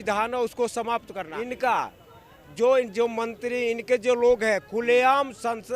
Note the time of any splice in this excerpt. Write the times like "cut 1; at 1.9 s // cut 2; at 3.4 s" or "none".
cut 1; at 1.2 s